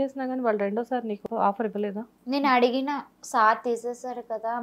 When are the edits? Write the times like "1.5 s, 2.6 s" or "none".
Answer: 1.2 s